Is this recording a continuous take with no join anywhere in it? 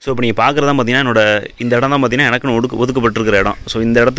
yes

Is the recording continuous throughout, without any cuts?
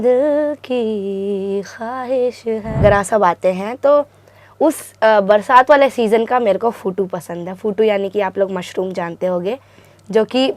no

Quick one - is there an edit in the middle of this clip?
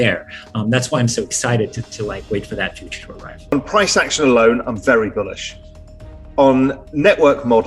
yes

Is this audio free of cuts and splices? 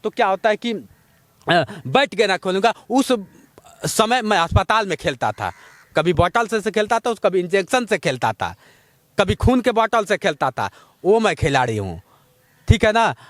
yes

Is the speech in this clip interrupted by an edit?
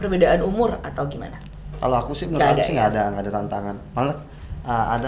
no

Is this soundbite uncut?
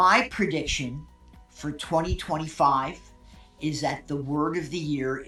yes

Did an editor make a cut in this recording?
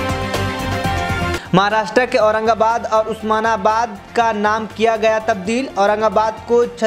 yes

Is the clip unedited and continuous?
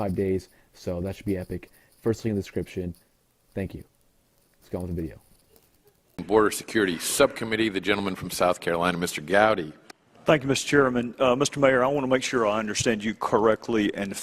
no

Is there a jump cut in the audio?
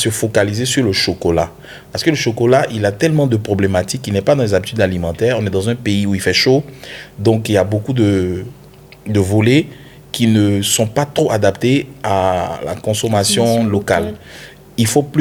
no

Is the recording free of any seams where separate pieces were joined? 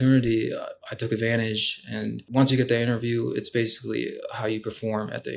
no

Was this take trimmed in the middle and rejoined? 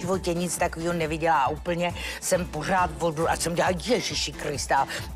no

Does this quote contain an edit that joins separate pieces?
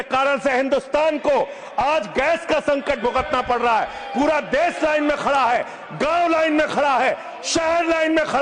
no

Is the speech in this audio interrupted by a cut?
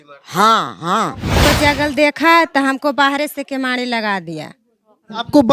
yes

